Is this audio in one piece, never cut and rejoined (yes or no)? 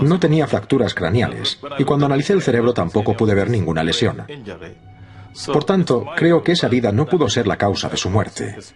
yes